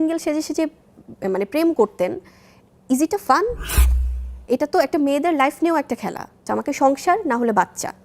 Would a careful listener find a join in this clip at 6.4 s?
yes; 1 cut; at 6.4 s

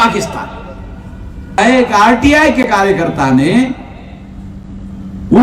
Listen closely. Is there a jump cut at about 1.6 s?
yes; 1 cut; at 1.6 s

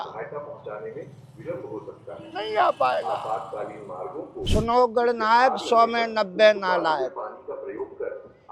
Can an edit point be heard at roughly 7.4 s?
no; 1 cut; at 4.3 s

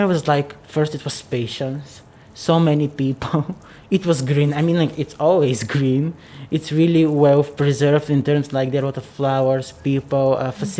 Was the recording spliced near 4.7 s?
no; 0 cuts

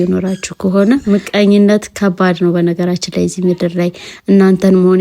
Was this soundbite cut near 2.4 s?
no; 1 cut; at 1.0 s

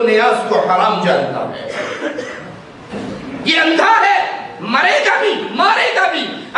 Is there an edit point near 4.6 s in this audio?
no; 1 cut; at 2.9 s

